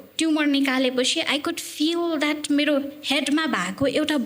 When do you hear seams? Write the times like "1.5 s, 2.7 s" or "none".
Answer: none